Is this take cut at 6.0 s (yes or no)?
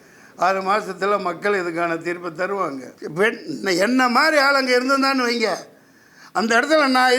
no